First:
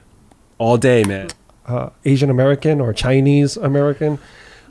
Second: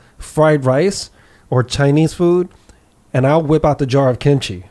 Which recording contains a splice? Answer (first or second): first